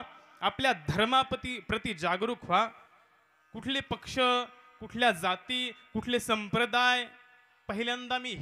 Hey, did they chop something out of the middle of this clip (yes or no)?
no